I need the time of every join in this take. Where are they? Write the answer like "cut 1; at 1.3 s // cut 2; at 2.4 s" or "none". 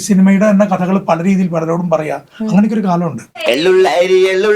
cut 1; at 3.3 s